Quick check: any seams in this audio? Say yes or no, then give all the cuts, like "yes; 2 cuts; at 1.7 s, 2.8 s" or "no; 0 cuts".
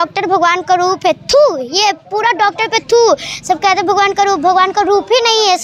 no; 0 cuts